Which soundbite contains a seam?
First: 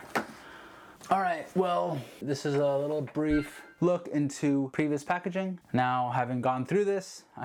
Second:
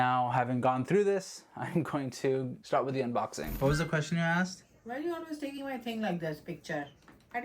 second; 1 cut; at 3.5 s

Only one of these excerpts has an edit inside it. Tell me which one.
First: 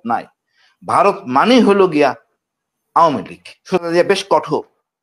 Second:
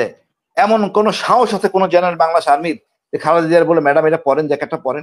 first; 1 cut; at 3.8 s

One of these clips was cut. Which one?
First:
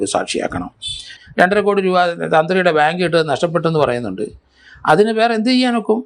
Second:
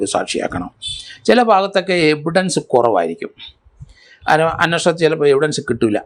first; 1 cut; at 1.1 s

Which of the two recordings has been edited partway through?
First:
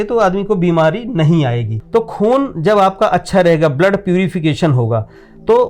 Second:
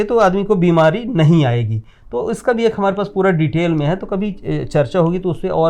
first; 1 cut; at 1.7 s

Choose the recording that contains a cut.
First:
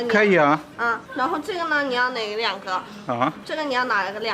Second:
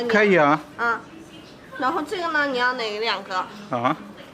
first; 2 cuts; at 1.0 s, 3.4 s

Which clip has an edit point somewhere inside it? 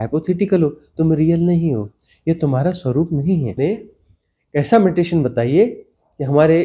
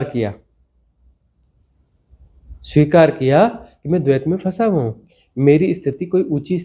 first; 1 cut; at 3.5 s

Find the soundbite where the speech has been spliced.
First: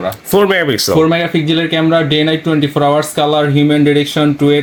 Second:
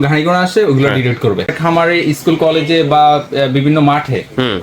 second; 1 cut; at 1.5 s

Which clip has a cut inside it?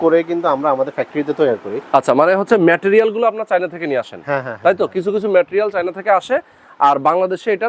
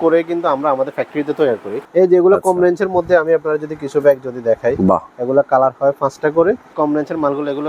second; 2 cuts; at 1.7 s, 6.7 s

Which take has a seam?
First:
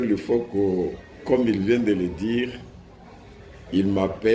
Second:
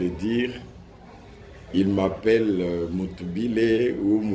first; 1 cut; at 1.1 s

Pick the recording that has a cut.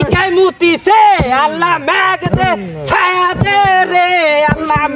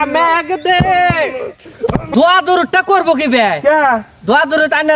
second; 1 cut; at 2.1 s

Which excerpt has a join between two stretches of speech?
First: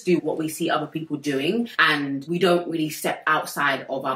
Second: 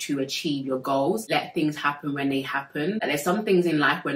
second; 2 cuts; at 1.2 s, 3.0 s

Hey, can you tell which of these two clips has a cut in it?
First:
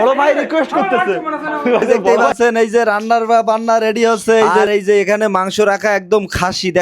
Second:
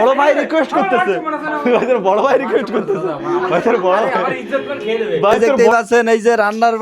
first; 2 cuts; at 2.3 s, 4.6 s

